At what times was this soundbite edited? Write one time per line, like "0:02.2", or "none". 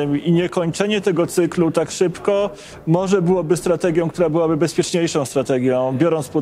none